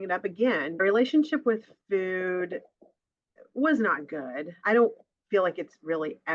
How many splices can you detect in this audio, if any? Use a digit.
2